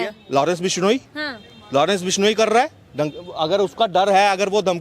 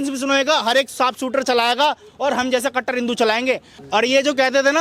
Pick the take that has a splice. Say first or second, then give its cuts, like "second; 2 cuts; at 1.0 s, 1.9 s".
second; 1 cut; at 3.7 s